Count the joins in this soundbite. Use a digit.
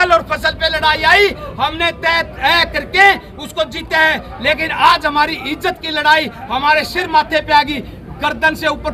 0